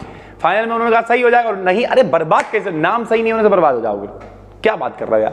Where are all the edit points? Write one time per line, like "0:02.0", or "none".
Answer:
none